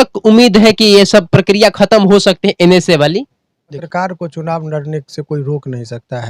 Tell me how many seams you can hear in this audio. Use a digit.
1